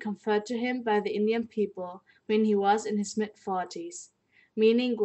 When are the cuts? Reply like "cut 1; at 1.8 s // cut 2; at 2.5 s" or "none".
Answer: cut 1; at 3.9 s

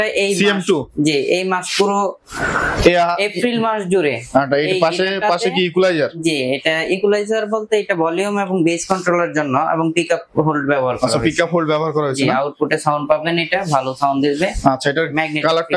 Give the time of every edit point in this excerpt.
none

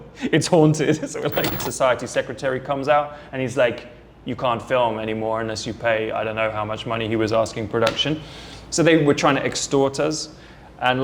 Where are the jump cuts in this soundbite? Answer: cut 1; at 1.6 s

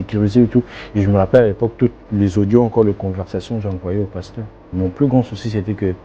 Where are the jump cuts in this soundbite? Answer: cut 1; at 4.7 s

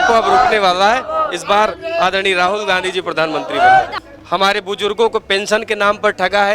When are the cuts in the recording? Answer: cut 1; at 4.0 s

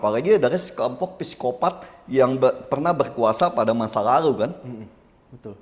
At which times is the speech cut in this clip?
none

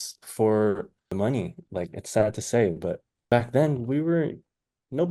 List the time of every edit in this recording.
cut 1; at 1.1 s // cut 2; at 3.1 s

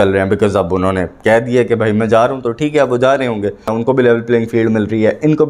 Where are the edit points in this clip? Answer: cut 1; at 3.8 s

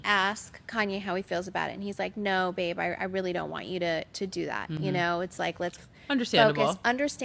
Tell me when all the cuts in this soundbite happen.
none

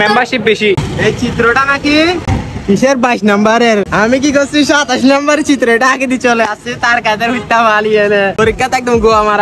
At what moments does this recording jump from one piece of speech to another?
cut 1; at 0.8 s // cut 2; at 2.4 s // cut 3; at 3.9 s // cut 4; at 8.3 s

